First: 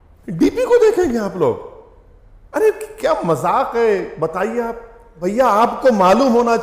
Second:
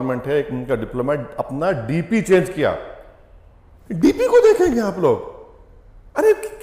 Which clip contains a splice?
first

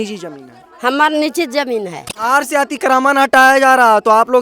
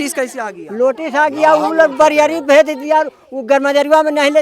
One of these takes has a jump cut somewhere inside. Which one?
first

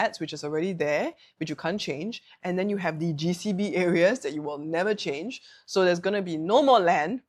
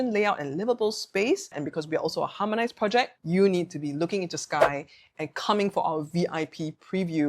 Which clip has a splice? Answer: second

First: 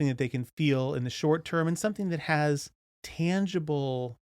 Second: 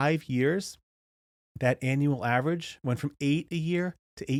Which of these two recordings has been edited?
first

